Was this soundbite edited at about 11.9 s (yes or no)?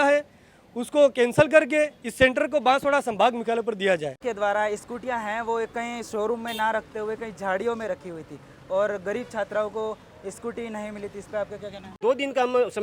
yes